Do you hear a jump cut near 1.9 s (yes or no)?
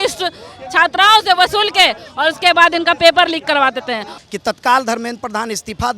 no